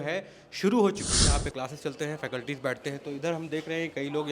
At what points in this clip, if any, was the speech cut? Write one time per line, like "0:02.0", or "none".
0:01.3